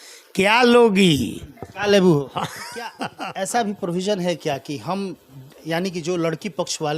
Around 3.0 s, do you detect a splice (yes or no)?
yes